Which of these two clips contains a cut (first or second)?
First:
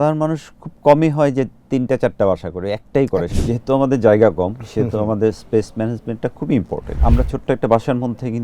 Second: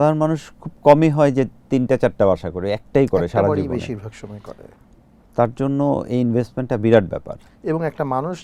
first